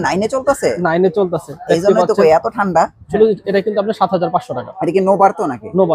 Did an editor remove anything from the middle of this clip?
yes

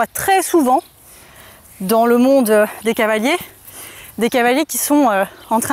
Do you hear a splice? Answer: no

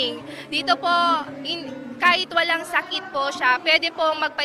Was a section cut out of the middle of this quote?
yes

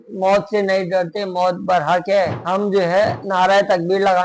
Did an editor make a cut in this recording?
no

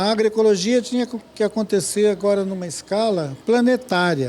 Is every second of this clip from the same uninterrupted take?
no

